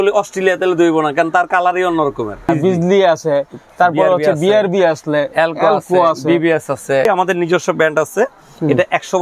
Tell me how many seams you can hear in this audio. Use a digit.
2